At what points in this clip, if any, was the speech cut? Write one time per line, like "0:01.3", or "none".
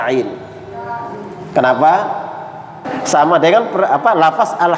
0:02.9